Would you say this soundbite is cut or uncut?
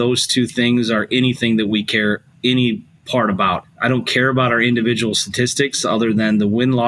cut